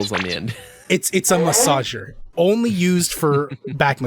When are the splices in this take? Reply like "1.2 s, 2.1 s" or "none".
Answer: 2.3 s